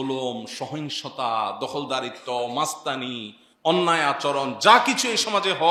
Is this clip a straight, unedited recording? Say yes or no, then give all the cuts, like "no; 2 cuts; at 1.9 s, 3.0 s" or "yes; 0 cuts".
yes; 0 cuts